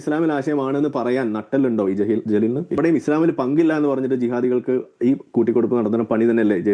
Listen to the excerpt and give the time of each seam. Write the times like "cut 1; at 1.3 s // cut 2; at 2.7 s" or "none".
cut 1; at 2.8 s